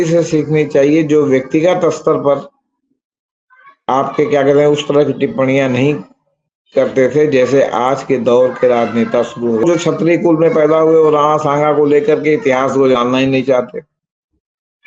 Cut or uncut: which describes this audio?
cut